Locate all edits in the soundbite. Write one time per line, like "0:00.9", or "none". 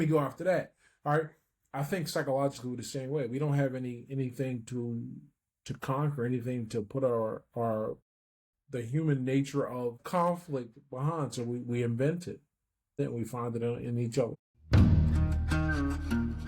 0:10.0
0:13.0
0:14.5